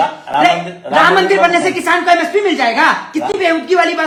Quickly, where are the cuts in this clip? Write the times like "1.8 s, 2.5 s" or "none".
none